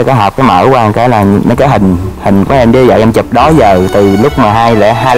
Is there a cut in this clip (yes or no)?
no